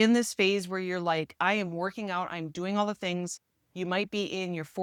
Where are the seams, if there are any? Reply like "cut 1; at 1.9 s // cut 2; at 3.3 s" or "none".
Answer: none